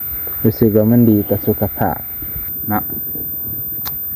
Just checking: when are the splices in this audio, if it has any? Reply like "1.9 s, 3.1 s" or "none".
2.4 s

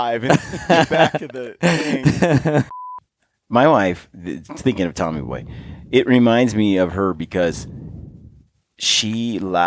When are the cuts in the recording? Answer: 2.8 s

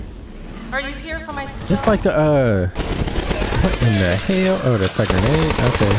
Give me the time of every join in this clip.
2.7 s

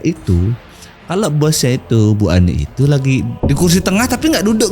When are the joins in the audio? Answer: 3.3 s

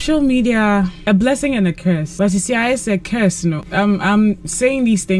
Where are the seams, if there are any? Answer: 1.0 s, 2.1 s, 3.6 s

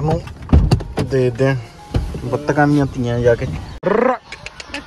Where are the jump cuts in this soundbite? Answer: 3.8 s

